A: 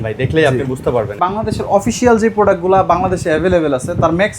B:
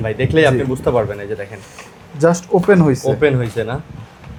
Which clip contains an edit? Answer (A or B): A